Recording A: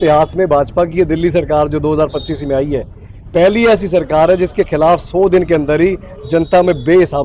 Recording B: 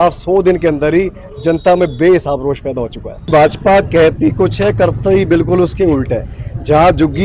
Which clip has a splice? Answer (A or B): B